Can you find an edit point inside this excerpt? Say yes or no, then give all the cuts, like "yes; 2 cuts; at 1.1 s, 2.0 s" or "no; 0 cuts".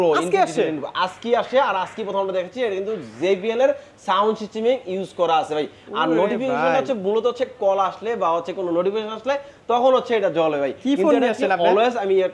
no; 0 cuts